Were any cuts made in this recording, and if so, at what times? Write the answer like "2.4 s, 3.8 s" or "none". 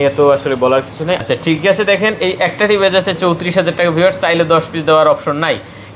1.2 s

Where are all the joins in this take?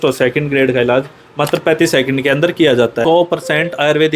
3.0 s

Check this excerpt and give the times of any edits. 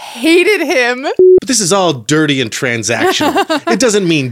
1.2 s

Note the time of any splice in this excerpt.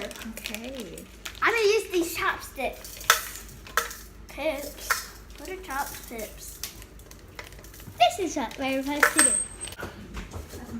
9.8 s

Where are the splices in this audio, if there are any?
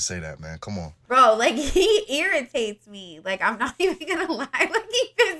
none

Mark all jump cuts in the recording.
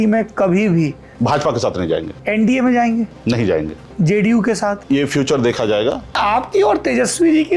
2.1 s, 3.8 s, 4.8 s, 6.2 s

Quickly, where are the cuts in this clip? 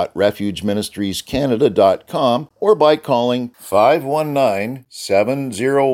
2.5 s

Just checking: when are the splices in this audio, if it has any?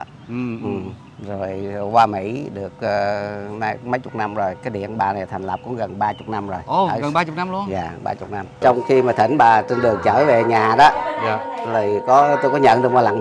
8.6 s

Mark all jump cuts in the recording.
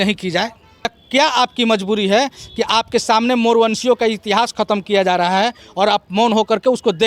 1.0 s

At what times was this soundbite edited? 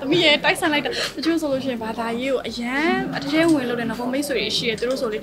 none

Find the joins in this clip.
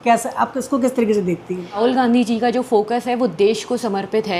1.8 s

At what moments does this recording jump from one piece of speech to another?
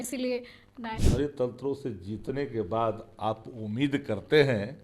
1.0 s

